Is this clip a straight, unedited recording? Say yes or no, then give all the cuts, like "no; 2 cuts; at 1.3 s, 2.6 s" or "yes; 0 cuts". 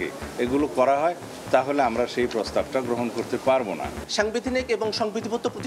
no; 1 cut; at 3.9 s